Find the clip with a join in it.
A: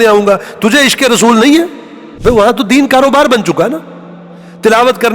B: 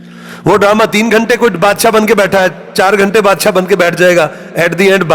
A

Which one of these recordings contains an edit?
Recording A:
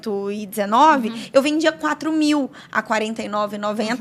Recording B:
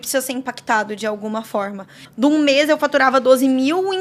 B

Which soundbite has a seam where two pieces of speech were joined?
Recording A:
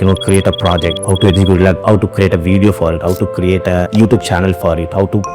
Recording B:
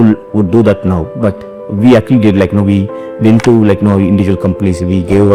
A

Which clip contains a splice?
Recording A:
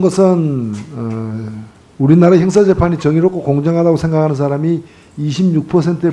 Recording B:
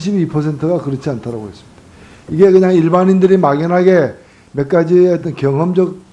A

